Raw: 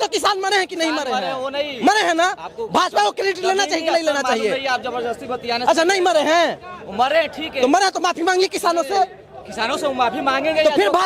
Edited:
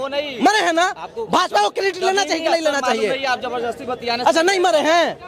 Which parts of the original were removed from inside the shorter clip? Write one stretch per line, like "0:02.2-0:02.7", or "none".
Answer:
none